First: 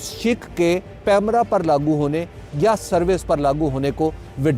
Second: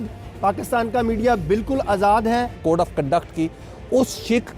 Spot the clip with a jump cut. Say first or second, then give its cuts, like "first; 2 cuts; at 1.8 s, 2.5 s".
second; 1 cut; at 2.6 s